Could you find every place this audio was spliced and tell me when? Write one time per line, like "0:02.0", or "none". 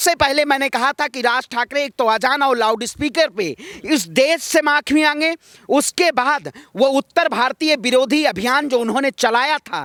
none